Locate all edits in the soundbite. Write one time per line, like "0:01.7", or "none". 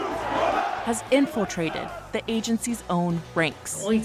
none